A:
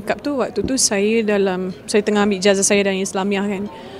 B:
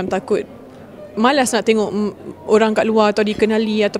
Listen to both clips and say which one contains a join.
A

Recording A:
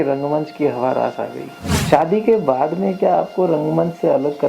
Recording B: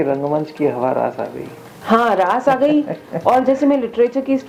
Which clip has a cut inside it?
A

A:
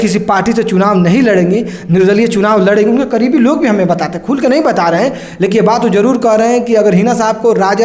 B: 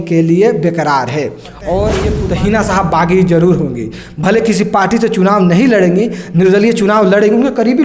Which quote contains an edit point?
B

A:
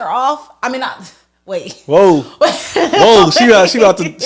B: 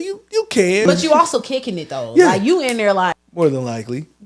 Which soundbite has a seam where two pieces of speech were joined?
B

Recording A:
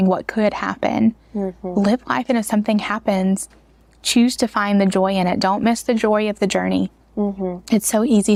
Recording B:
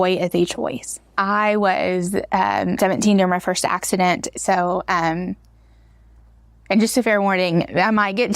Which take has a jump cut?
B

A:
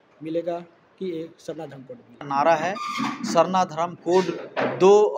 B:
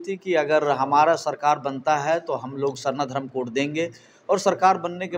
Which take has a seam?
A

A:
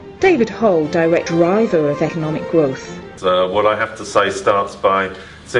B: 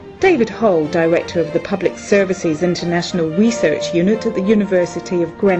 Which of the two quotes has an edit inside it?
B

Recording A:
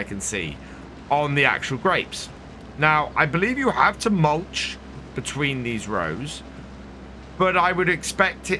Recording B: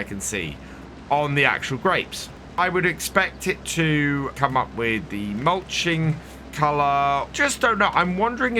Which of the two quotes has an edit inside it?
B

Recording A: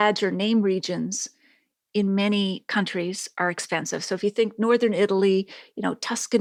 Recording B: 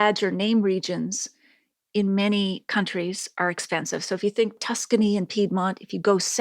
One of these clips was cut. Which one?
B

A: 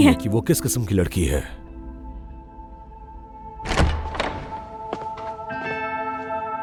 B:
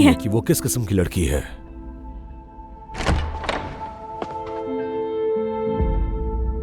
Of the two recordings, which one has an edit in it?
B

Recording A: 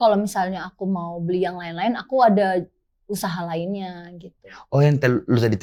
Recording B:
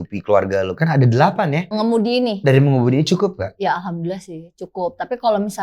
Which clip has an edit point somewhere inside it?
B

